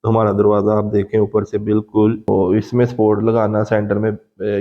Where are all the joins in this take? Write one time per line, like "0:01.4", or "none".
0:02.3